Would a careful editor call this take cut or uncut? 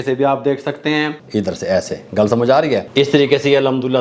cut